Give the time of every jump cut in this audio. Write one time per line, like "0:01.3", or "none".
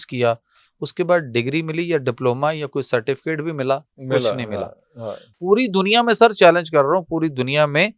0:05.3

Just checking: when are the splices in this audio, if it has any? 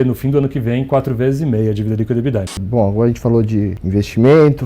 0:02.6
0:03.8

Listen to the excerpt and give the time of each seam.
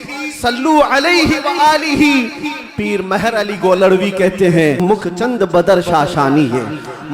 0:04.8

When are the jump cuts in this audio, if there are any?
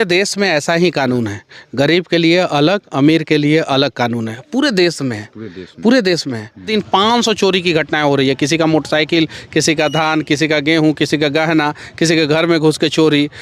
0:06.7

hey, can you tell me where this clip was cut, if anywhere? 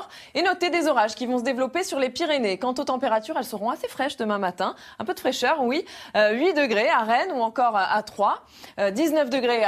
0:07.8

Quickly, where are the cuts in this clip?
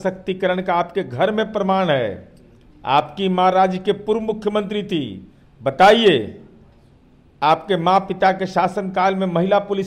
none

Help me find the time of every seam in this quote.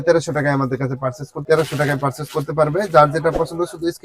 0:01.4

